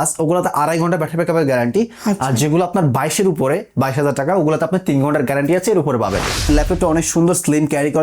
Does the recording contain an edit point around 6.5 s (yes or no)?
yes